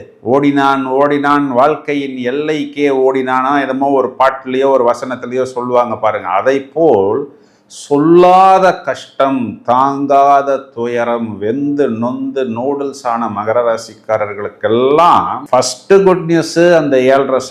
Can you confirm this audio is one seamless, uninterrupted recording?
yes; 0 cuts

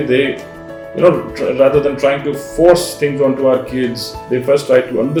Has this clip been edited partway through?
no; 0 cuts

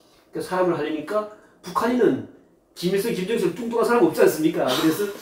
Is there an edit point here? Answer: no; 0 cuts

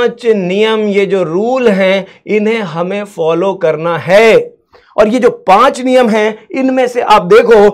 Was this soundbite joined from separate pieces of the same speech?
no; 0 cuts

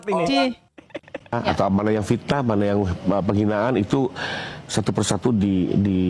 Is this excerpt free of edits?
no; 1 cut; at 1.3 s

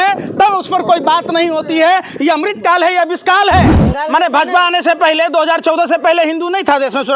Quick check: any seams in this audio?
yes; 1 cut; at 3.8 s

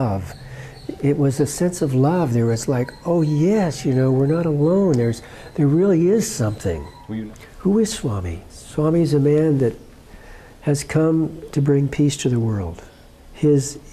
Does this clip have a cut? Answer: yes; 1 cut; at 7.0 s

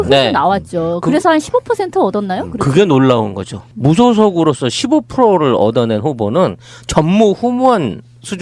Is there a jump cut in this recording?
yes; 1 cut; at 3.3 s

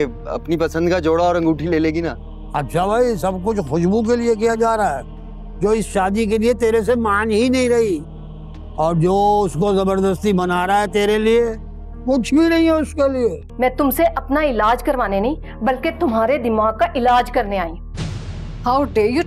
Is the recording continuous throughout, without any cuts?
no; 1 cut; at 13.4 s

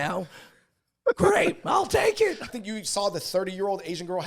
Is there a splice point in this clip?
yes; 1 cut; at 2.6 s

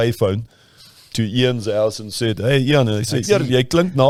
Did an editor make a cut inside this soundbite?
no; 0 cuts

